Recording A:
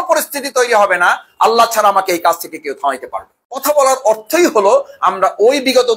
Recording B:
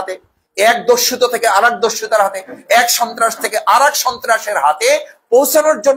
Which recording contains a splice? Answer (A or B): A